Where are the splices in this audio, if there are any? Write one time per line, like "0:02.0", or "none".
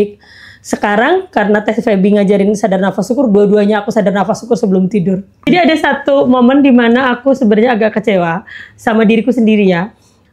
0:05.5